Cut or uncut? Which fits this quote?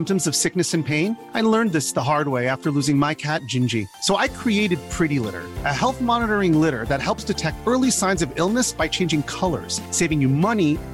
uncut